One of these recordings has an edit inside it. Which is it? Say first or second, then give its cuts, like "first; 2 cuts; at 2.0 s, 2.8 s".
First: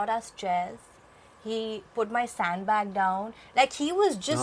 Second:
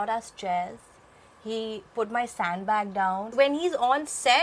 second; 1 cut; at 3.3 s